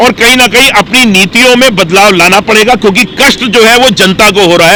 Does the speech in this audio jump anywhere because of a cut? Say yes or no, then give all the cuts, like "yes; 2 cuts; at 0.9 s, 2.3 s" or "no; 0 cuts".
no; 0 cuts